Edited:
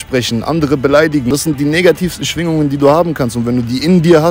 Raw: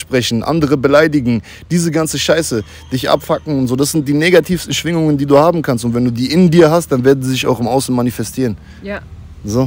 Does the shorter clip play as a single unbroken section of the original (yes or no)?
no